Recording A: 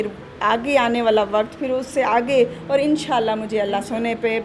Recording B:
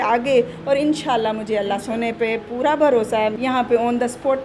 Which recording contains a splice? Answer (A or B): B